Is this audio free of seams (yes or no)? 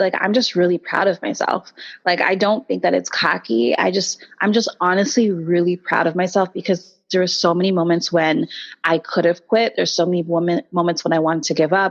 yes